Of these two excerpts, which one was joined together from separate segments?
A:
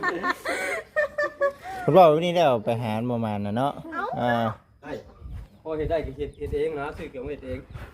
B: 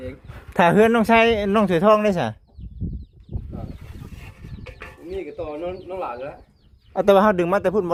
A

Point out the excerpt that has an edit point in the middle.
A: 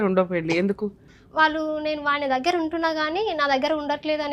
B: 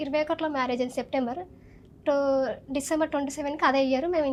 A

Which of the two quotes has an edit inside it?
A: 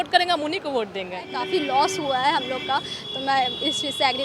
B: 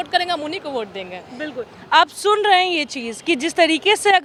A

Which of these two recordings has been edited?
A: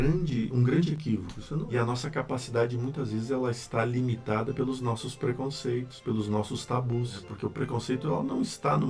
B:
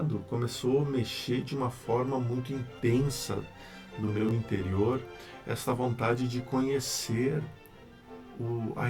A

